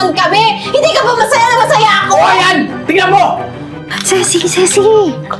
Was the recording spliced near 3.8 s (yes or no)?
yes